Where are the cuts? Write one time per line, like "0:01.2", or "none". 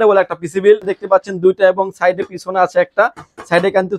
0:00.9

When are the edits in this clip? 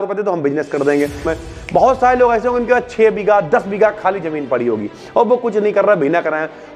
0:01.3

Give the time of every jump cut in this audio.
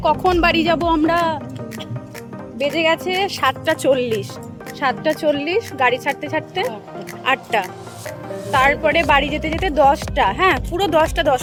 none

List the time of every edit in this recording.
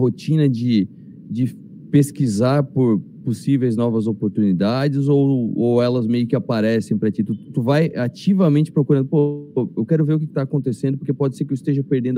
none

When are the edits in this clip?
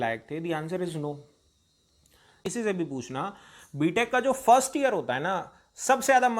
0:02.3

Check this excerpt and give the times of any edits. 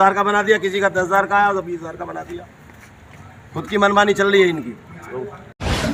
none

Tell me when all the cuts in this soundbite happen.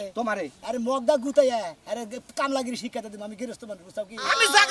none

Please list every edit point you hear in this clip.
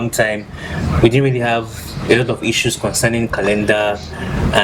none

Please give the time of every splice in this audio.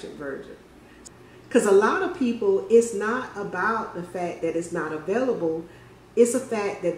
0:01.0

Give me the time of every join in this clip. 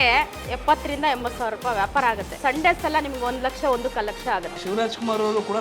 0:02.4
0:04.5

